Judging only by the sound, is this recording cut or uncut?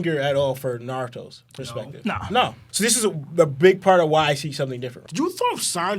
cut